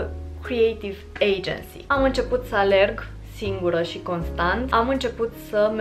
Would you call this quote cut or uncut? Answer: cut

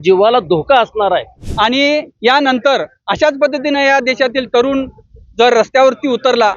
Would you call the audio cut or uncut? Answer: cut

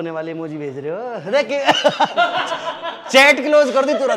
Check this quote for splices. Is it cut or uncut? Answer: uncut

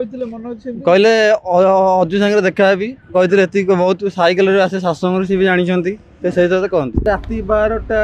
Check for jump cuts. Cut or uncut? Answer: cut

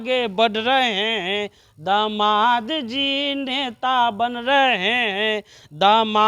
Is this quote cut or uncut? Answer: uncut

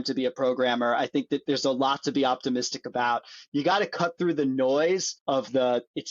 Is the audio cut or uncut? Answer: cut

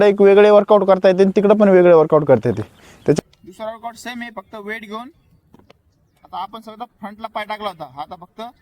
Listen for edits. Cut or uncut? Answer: cut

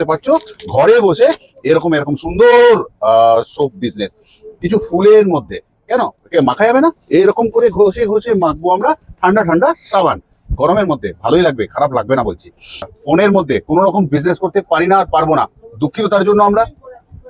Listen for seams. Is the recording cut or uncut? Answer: cut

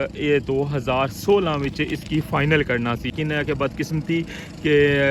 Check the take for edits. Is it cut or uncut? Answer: cut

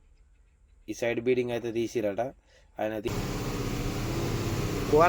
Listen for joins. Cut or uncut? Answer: cut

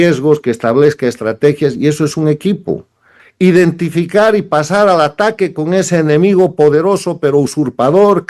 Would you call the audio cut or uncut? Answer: cut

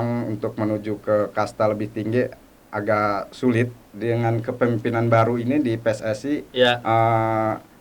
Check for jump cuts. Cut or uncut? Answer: cut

